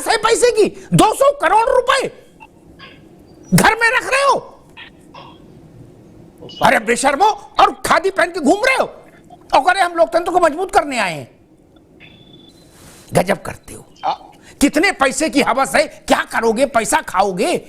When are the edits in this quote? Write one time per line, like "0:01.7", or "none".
0:12.5